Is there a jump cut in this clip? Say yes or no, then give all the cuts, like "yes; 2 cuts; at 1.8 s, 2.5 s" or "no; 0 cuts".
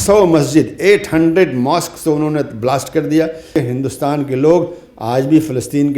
yes; 1 cut; at 3.5 s